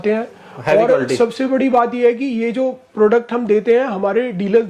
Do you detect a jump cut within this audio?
no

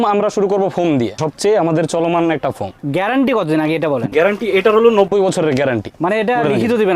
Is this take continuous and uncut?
no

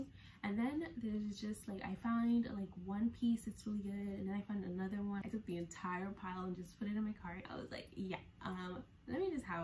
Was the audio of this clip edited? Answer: yes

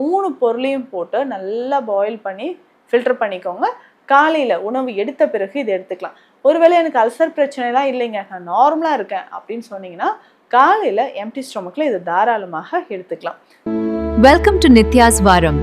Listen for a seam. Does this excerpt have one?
yes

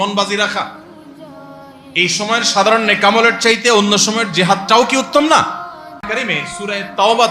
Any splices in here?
yes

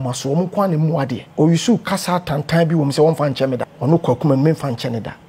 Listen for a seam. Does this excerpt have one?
yes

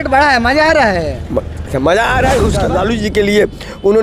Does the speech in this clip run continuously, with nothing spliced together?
no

